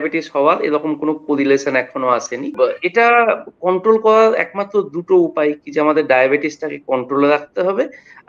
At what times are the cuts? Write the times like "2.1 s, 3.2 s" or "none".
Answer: 2.5 s

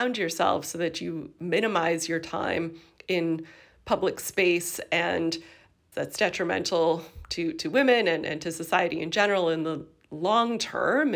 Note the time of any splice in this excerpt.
none

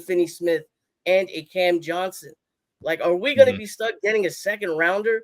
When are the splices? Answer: none

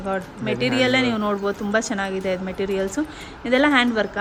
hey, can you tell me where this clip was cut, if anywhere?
none

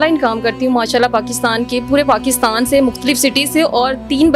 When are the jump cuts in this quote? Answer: none

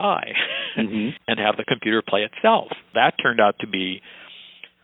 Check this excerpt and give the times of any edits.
1.2 s, 2.9 s

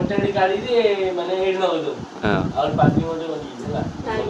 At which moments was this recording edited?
none

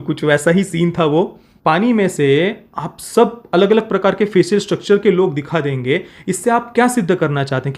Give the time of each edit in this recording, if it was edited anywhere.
1.4 s

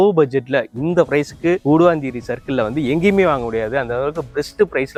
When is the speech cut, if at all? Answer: none

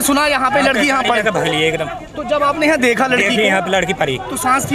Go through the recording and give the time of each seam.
none

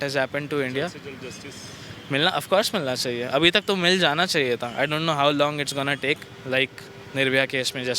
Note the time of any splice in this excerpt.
none

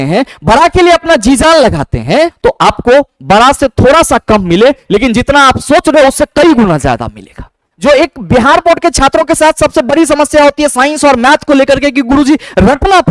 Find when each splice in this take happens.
2.3 s, 7.7 s

